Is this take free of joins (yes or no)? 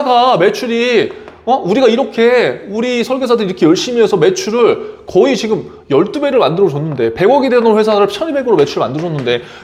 yes